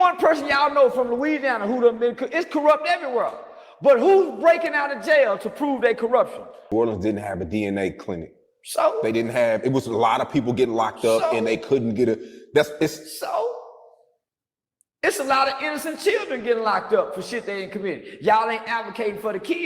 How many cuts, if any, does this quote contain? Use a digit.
1